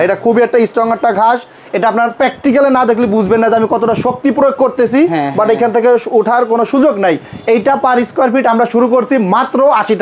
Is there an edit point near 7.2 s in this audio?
no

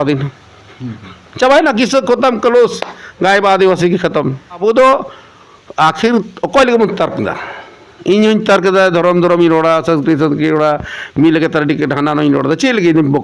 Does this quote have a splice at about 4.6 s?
yes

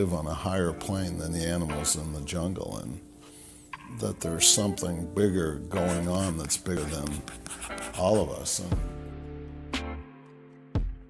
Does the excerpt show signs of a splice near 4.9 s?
no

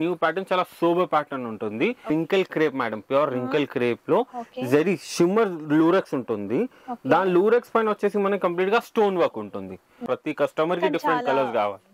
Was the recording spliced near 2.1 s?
yes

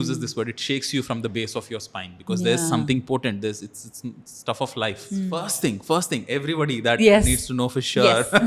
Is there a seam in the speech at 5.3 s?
yes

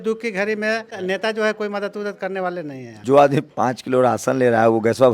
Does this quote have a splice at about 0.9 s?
yes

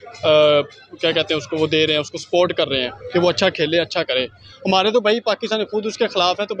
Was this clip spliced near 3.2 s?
no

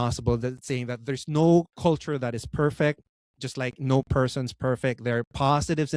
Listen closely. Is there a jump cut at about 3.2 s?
no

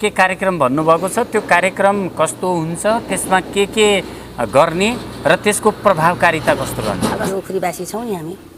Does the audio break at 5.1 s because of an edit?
no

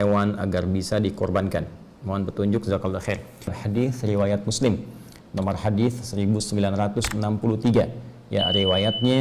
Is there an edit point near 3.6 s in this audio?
yes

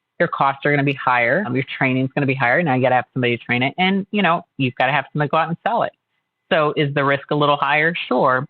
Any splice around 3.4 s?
no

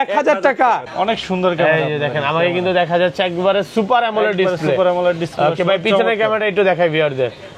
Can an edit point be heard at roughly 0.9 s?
yes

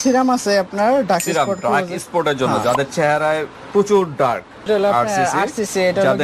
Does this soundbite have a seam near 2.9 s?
no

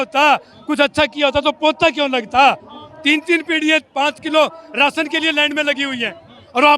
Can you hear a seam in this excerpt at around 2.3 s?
no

